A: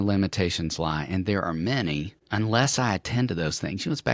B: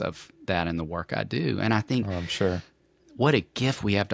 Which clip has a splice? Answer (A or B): A